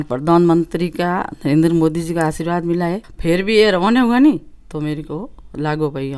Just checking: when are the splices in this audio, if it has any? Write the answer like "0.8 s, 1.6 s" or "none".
3.1 s